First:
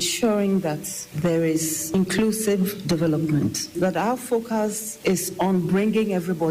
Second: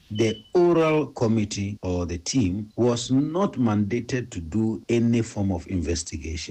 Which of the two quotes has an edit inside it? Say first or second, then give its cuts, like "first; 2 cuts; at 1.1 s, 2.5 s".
first; 2 cuts; at 3.7 s, 4.9 s